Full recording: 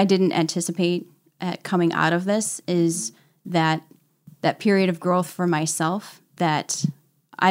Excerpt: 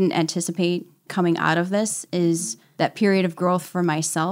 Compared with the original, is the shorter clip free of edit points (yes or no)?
no